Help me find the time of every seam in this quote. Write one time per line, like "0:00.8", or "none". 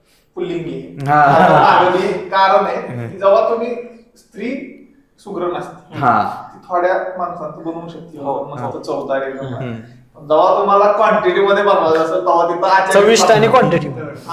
none